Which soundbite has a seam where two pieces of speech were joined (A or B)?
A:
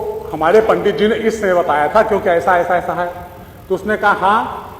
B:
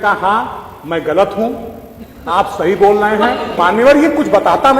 B